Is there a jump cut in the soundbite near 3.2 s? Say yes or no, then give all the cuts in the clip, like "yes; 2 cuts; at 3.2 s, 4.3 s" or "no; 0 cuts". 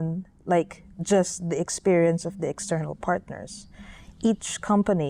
no; 0 cuts